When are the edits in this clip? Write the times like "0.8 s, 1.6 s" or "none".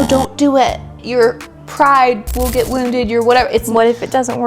1.0 s